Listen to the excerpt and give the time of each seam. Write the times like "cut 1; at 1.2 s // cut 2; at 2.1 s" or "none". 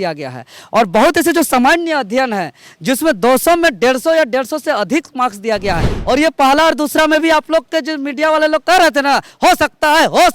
cut 1; at 5.9 s